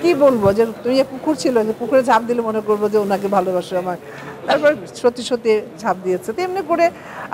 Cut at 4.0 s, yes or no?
no